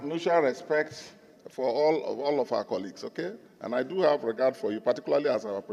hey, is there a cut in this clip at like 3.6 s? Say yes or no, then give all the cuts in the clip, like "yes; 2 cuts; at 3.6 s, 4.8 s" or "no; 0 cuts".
no; 0 cuts